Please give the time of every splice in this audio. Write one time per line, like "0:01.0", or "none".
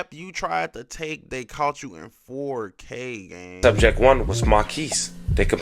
0:03.6